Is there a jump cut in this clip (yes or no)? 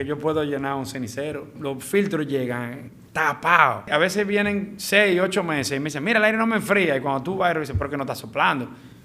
yes